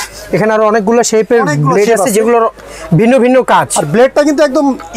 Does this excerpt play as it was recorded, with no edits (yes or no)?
yes